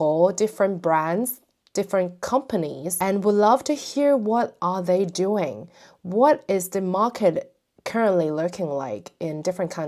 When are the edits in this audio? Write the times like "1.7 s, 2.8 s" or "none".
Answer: none